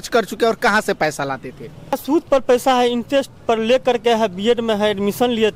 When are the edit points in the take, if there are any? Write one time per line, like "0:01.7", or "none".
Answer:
0:02.0